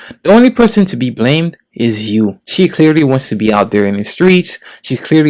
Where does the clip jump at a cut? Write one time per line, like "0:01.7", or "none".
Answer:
0:02.4